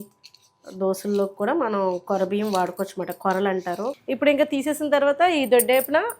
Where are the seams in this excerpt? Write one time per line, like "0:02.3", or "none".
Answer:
0:04.0